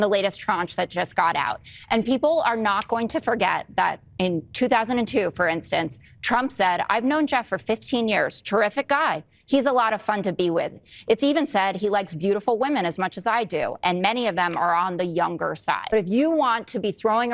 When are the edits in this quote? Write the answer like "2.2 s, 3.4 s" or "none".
15.9 s